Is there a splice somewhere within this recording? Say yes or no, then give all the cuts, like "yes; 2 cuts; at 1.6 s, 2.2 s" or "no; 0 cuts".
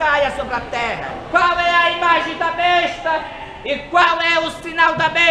yes; 1 cut; at 1.1 s